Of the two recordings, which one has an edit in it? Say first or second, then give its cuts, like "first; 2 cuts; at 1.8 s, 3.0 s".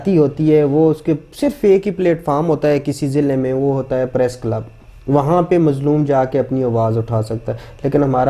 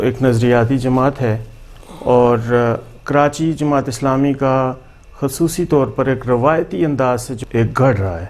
second; 1 cut; at 7.4 s